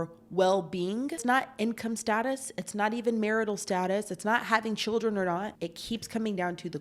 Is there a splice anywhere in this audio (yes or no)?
yes